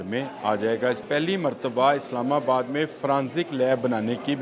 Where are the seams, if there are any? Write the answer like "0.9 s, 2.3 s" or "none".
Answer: 1.0 s